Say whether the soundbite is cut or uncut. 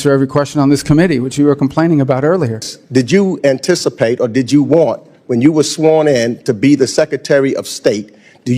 cut